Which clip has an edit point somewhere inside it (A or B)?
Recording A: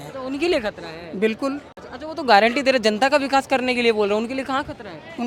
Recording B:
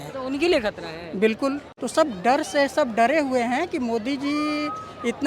B